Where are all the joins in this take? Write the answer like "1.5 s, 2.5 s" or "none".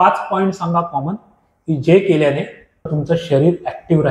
2.9 s